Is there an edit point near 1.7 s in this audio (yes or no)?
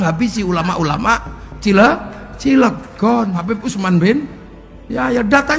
no